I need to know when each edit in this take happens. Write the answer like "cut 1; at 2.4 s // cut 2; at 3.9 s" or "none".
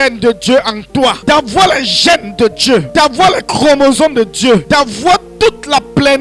cut 1; at 1.2 s // cut 2; at 2.9 s // cut 3; at 4.6 s